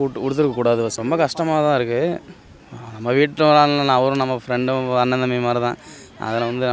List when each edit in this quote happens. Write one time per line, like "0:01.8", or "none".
0:00.9